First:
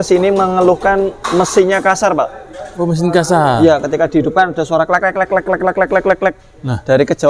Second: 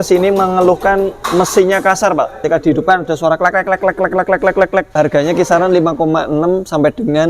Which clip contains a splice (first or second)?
second